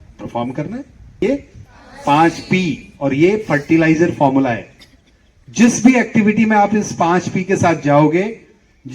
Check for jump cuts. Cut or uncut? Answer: cut